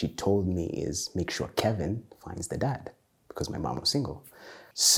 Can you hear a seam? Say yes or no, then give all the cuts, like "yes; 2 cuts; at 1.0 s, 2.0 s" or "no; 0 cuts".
no; 0 cuts